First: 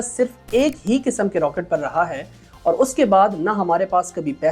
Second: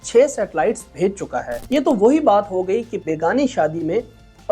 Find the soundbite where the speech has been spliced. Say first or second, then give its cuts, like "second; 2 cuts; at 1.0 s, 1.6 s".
second; 1 cut; at 1.6 s